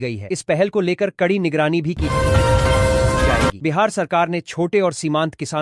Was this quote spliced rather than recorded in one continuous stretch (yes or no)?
yes